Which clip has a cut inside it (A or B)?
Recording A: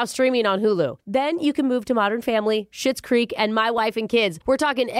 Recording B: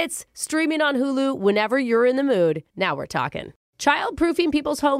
B